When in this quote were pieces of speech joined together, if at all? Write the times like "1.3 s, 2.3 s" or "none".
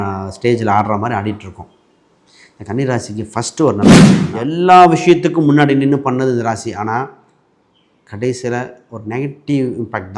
4.2 s

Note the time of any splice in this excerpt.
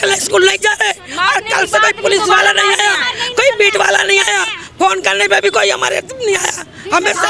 none

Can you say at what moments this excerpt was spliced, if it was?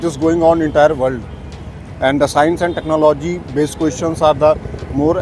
none

